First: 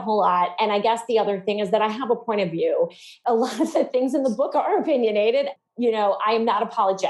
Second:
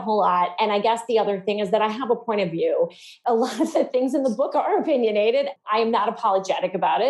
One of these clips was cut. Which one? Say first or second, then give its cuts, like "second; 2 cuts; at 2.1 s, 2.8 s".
second; 1 cut; at 5.7 s